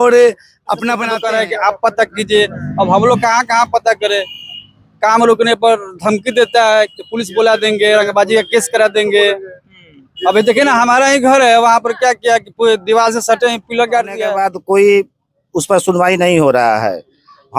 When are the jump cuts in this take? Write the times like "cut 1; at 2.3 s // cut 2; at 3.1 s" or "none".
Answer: cut 1; at 1.1 s // cut 2; at 14.2 s